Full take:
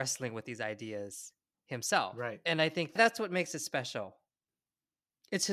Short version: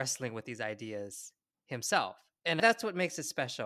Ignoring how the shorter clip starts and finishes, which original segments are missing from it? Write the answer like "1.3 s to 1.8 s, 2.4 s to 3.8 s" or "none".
2.6 s to 2.9 s